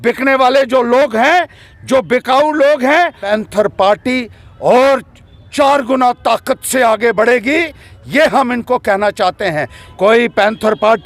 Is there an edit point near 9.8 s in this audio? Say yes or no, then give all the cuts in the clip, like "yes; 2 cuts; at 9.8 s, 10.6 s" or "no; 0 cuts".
yes; 2 cuts; at 3.2 s, 9.8 s